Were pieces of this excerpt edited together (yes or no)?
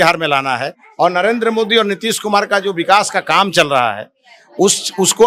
no